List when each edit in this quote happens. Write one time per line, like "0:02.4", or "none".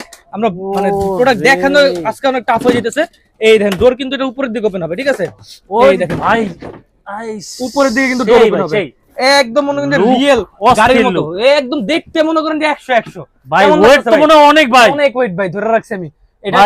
none